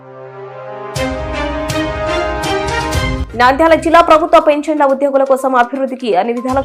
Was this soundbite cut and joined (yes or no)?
yes